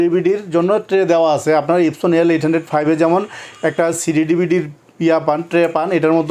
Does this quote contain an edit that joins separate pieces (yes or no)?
no